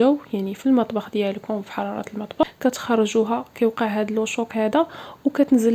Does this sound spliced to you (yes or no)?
yes